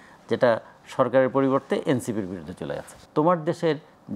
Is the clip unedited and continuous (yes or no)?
no